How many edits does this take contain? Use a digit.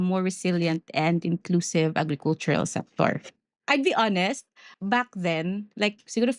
2